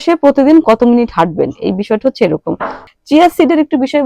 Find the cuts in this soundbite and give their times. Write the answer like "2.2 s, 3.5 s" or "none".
2.8 s